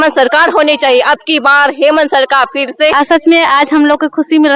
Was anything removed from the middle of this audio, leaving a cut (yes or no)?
yes